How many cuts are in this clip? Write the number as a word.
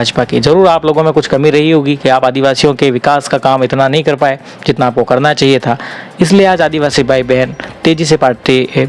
zero